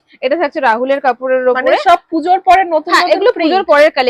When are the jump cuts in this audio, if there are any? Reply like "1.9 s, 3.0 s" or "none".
none